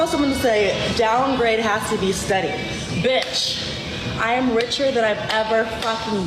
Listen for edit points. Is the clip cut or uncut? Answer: uncut